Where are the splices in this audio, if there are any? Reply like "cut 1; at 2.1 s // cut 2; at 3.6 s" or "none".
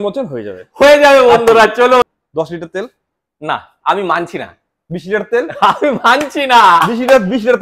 cut 1; at 2.0 s